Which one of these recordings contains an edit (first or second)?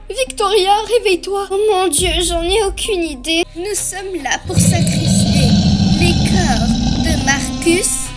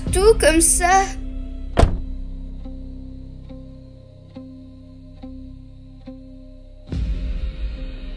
first